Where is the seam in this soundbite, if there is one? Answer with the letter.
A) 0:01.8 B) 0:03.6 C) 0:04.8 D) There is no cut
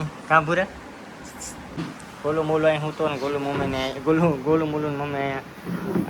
A